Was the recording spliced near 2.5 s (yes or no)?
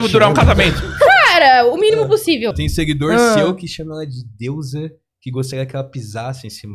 yes